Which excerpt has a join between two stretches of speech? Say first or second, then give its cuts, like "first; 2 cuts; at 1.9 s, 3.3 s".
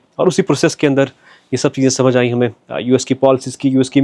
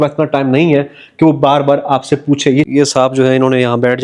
second; 1 cut; at 2.7 s